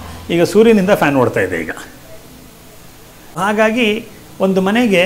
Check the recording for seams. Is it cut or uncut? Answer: cut